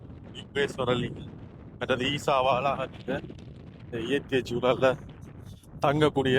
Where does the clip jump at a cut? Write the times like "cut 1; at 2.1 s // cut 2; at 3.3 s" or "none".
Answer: none

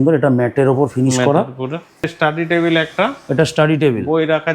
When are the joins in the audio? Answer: cut 1; at 2.1 s

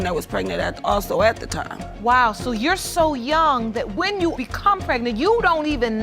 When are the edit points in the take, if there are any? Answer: cut 1; at 1.8 s

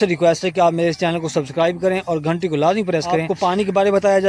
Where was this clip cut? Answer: cut 1; at 3.3 s

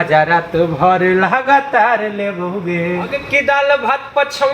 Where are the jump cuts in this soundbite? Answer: cut 1; at 3.2 s

